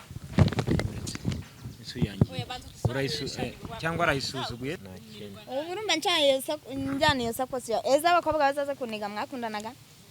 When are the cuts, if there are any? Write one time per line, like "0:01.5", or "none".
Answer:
0:04.8